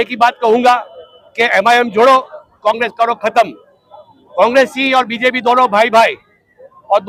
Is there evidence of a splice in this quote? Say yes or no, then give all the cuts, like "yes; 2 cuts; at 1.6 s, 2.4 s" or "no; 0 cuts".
no; 0 cuts